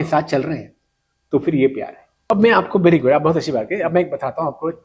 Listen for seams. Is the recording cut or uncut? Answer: cut